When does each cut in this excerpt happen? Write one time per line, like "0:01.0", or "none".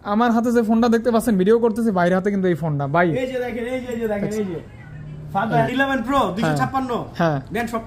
0:05.7